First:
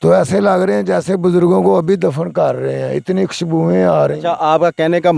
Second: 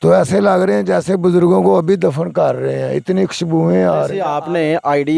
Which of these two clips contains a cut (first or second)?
second